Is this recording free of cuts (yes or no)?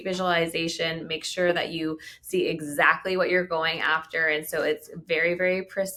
yes